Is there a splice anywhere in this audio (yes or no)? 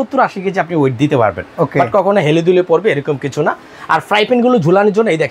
no